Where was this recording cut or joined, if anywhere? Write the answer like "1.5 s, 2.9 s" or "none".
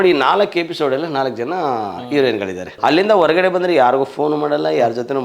2.7 s

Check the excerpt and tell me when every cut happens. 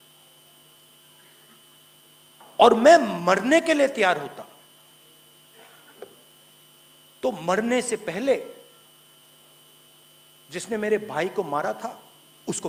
none

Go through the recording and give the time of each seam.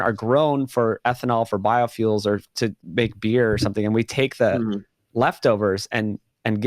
2.8 s

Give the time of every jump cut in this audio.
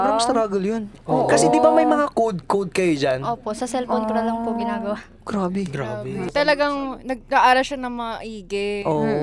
none

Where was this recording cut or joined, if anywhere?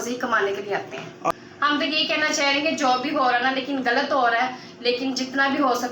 1.3 s

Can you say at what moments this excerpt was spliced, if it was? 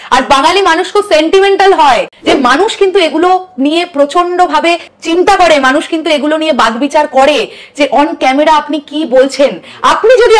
2.1 s

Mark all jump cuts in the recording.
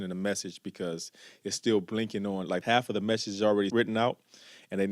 2.6 s, 3.7 s

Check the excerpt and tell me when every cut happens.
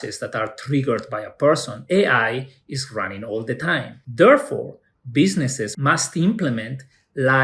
4.0 s, 5.7 s

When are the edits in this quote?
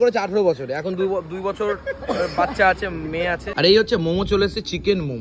3.5 s

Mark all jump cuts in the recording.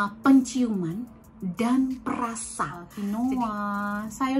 2.8 s

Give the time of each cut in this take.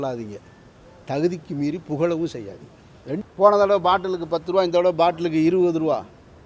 3.1 s

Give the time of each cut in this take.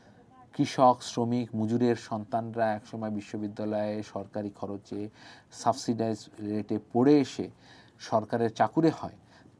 none

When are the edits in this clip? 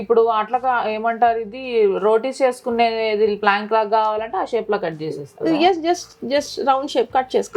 none

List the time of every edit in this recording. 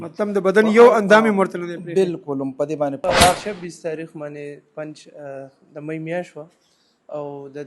3.3 s

